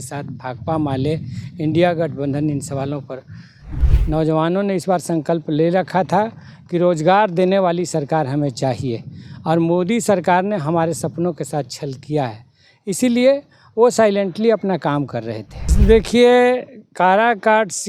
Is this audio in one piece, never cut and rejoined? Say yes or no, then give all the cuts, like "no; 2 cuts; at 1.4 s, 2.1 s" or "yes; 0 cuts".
no; 2 cuts; at 3.6 s, 15.7 s